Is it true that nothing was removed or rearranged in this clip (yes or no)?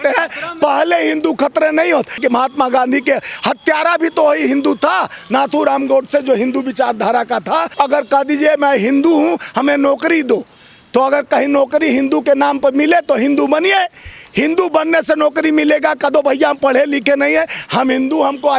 no